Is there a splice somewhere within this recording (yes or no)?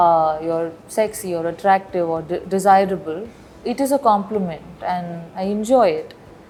no